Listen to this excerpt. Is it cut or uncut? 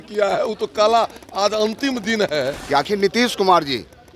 cut